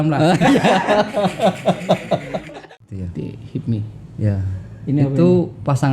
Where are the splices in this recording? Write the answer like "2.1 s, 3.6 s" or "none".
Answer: 2.6 s

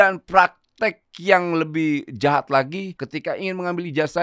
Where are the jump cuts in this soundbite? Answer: 3.0 s

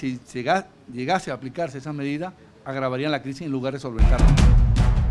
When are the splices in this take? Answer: 4.1 s

